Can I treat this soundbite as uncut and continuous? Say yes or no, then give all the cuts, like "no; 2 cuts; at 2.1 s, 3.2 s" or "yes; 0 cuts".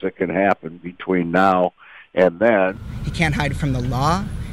no; 1 cut; at 2.8 s